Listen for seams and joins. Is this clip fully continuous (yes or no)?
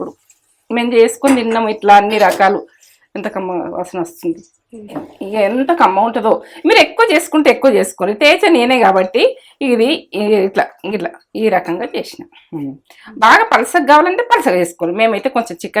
no